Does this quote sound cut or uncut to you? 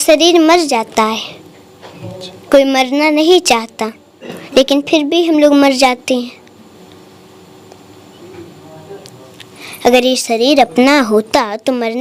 uncut